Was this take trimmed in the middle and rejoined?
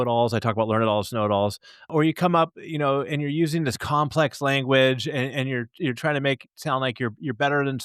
yes; 1 cut; at 1.9 s

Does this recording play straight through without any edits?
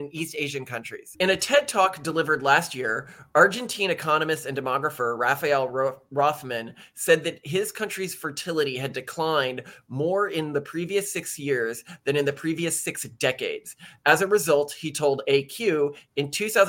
no; 1 cut; at 1.0 s

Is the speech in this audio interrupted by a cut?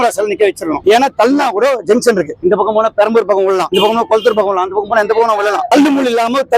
yes; 1 cut; at 3.7 s

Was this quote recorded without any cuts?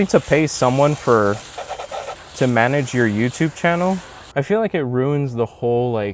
no; 1 cut; at 4.2 s

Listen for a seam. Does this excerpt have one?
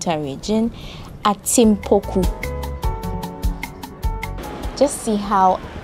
yes; 2 cuts; at 2.3 s, 4.4 s

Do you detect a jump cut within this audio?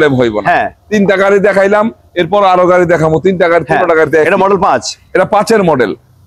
no; 0 cuts

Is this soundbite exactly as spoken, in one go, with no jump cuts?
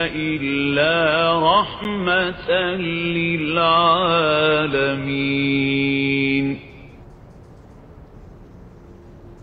yes; 0 cuts

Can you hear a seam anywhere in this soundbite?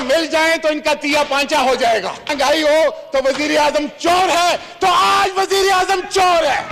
no; 0 cuts

